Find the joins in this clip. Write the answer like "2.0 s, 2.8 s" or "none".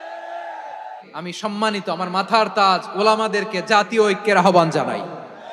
1.0 s